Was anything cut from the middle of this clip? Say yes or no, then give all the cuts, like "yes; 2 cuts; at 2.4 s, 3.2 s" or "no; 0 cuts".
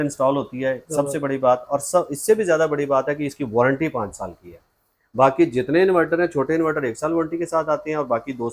no; 0 cuts